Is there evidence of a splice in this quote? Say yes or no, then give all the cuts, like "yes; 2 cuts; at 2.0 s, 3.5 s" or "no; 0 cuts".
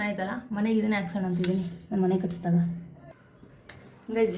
yes; 1 cut; at 2.9 s